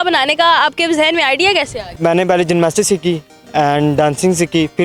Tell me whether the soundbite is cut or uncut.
uncut